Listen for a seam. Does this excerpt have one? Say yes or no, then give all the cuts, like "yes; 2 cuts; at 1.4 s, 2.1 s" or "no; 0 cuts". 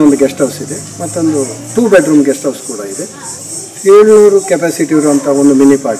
yes; 1 cut; at 3.5 s